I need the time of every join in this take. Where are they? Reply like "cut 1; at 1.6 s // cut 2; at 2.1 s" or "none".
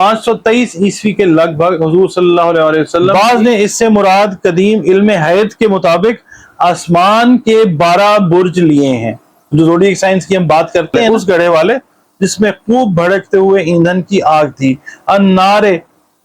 cut 1; at 3.2 s // cut 2; at 11.1 s